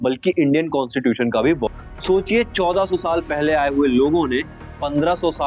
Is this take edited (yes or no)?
yes